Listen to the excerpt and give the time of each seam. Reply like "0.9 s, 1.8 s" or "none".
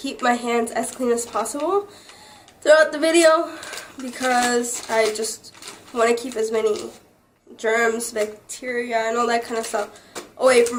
none

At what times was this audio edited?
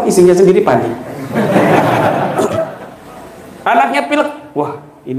2.8 s

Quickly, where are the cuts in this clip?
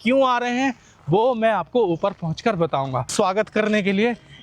3.1 s

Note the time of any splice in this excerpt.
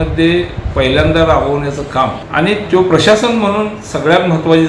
2.2 s

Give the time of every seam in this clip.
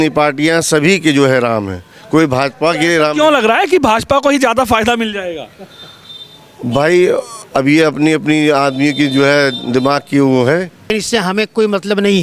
10.9 s

